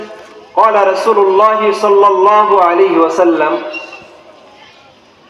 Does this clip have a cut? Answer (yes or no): no